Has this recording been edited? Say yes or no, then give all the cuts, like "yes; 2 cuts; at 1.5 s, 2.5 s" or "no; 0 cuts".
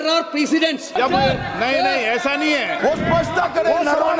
yes; 2 cuts; at 1.0 s, 2.8 s